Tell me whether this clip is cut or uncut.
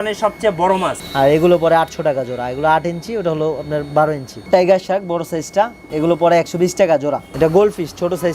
cut